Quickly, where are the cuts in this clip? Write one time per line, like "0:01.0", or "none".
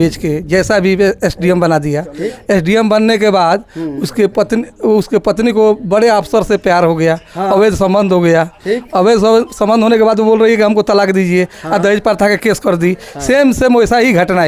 none